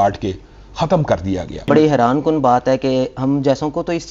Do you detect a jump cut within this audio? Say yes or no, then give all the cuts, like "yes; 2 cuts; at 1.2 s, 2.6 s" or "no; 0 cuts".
yes; 1 cut; at 1.7 s